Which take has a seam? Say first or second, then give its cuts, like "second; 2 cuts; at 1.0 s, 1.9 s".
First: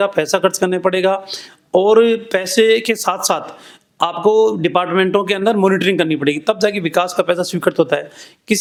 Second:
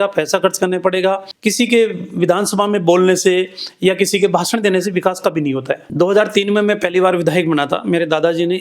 second; 2 cuts; at 1.3 s, 5.9 s